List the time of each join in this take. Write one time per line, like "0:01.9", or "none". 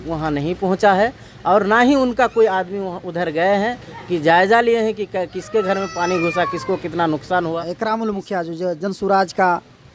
0:07.7